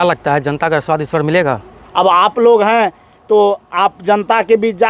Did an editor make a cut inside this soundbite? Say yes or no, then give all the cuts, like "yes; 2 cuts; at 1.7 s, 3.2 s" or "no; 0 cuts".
no; 0 cuts